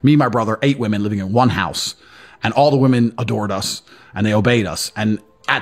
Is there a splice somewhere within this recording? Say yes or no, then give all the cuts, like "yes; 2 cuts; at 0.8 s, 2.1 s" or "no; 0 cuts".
no; 0 cuts